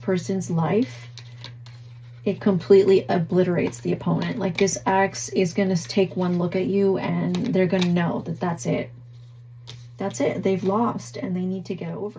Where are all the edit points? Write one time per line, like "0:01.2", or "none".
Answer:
none